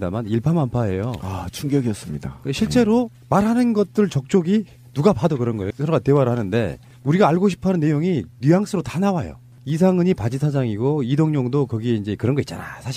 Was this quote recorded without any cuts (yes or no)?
yes